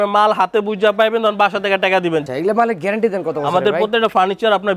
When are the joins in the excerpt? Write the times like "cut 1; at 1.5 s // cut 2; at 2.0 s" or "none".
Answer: cut 1; at 2.3 s